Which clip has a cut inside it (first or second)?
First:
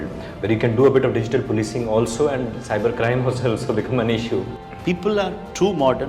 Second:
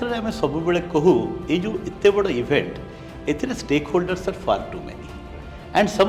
first